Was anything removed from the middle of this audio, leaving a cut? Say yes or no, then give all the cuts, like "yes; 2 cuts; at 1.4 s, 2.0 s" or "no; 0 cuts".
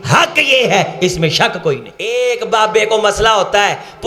yes; 1 cut; at 1.9 s